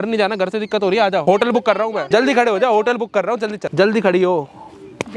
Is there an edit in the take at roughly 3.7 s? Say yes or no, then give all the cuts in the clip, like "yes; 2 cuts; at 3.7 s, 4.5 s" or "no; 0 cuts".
yes; 3 cuts; at 1.2 s, 2.0 s, 3.7 s